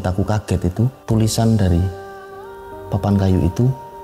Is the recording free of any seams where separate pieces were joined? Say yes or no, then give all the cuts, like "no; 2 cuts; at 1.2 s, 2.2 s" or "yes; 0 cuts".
no; 1 cut; at 1.0 s